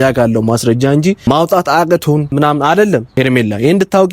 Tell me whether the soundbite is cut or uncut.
cut